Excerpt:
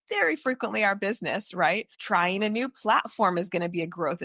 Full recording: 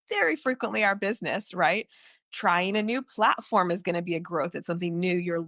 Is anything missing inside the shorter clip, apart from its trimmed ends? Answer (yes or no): yes